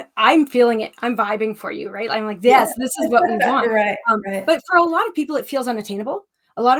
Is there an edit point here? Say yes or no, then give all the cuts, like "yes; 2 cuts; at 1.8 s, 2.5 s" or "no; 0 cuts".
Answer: no; 0 cuts